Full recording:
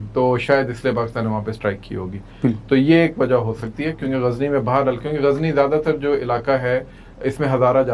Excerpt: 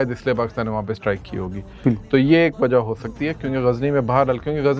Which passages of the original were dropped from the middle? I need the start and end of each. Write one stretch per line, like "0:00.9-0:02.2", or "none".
none